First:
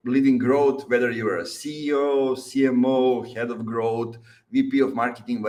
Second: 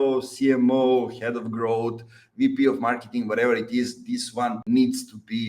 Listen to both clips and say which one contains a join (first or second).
second